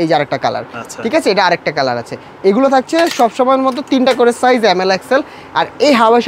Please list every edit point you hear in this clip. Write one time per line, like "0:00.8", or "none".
none